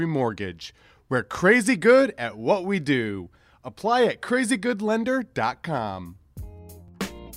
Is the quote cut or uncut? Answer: cut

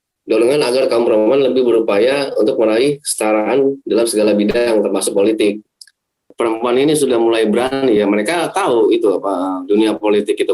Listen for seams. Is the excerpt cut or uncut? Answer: cut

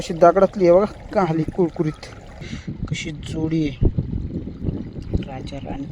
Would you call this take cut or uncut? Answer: cut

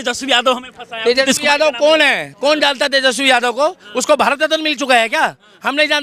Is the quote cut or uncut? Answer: uncut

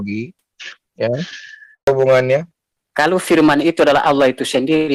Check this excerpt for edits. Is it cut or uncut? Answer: cut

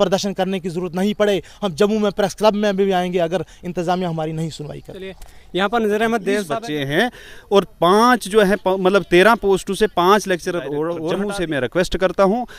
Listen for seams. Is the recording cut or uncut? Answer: cut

